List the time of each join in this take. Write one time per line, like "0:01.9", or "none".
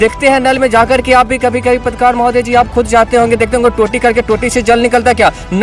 none